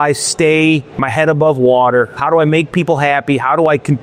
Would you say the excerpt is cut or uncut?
uncut